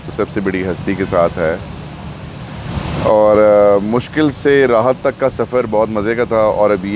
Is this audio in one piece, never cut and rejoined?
yes; 0 cuts

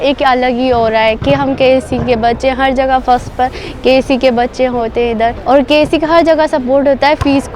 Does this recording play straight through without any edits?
no; 1 cut; at 5.4 s

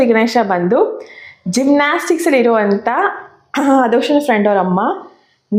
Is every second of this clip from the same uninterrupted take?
yes; 0 cuts

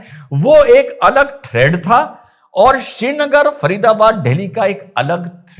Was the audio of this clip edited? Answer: no; 0 cuts

